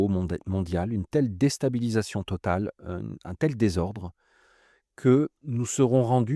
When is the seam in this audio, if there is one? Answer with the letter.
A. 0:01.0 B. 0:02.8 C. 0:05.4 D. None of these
C